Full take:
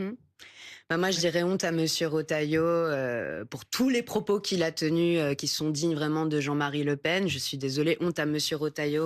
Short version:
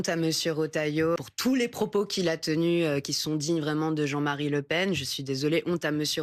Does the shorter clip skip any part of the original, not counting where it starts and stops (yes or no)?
yes